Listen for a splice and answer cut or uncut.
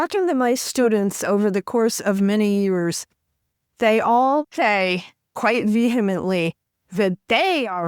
cut